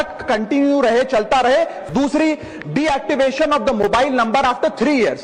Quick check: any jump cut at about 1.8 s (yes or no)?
yes